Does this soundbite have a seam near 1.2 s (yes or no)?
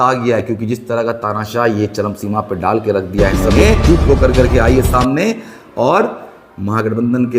no